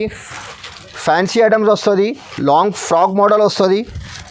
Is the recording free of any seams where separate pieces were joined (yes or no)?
yes